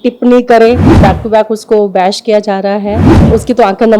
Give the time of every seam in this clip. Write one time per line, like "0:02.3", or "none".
0:00.9
0:03.1

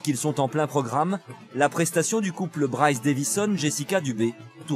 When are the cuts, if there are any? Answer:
none

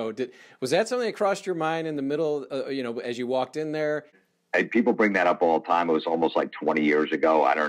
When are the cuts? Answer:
0:04.2

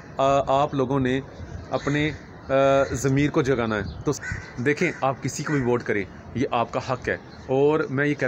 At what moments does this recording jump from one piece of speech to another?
0:04.2

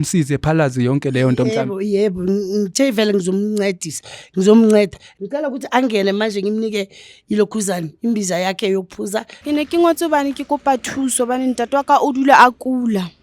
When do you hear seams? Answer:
0:05.1
0:09.3

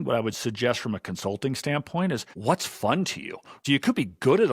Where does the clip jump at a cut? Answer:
0:02.3
0:03.6

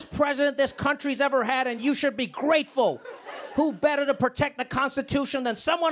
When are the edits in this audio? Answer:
none

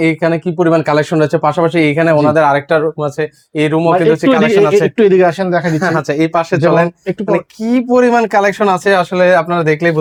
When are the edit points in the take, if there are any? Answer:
none

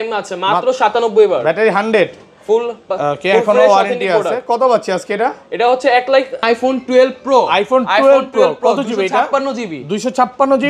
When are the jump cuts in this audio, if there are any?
0:06.4

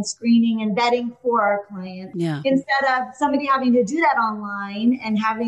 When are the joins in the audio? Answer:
0:02.1

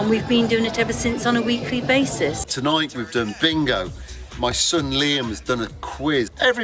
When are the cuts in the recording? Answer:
0:02.4

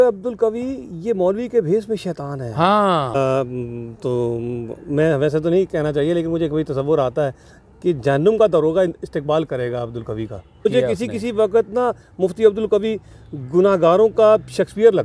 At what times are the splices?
0:03.2
0:10.7

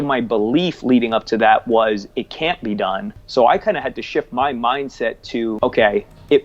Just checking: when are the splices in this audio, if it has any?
0:03.2
0:05.6

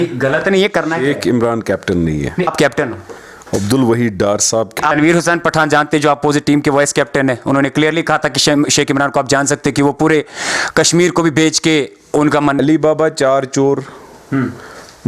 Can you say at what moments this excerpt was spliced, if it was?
0:02.5
0:04.7
0:12.6

